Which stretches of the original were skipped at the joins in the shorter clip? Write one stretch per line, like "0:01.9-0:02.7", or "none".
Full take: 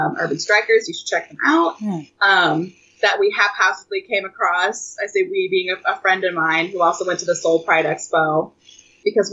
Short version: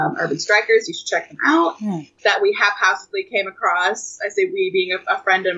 0:02.1-0:02.8